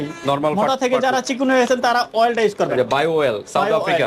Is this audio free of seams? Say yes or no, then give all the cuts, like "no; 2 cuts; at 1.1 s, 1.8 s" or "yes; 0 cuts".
yes; 0 cuts